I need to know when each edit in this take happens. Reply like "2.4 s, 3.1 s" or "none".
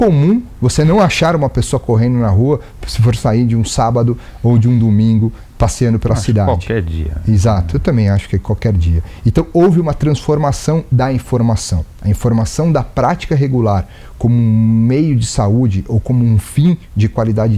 none